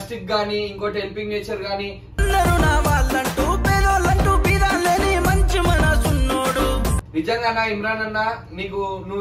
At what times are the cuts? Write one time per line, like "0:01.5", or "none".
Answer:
0:07.0